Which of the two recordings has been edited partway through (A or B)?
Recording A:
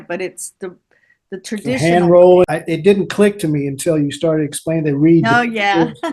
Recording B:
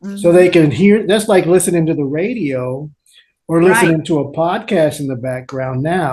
A